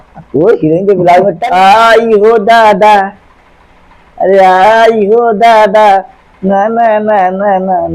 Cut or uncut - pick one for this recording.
cut